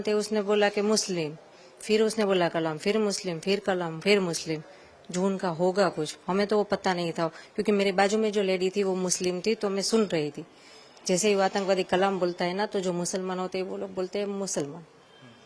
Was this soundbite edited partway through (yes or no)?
no